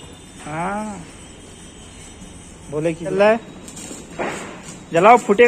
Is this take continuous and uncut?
no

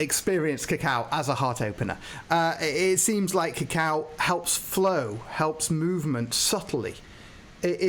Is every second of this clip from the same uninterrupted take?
yes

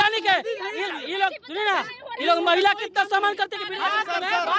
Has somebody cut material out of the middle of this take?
no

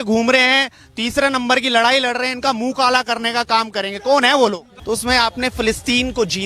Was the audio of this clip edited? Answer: yes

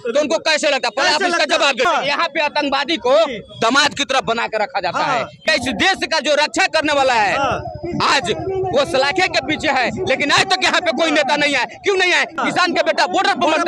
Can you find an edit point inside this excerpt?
yes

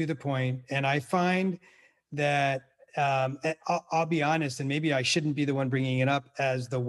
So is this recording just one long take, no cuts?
yes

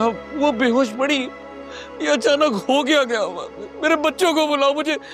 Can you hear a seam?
no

